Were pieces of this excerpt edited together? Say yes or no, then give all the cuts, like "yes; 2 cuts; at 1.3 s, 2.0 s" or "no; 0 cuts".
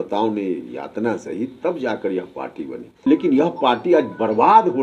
yes; 1 cut; at 3.1 s